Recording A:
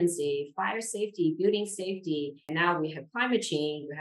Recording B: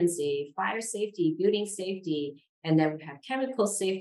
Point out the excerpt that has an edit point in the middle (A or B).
A